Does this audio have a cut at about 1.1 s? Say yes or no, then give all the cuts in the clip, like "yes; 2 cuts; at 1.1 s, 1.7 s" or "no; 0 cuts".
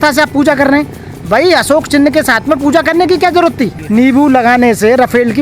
no; 1 cut; at 3.8 s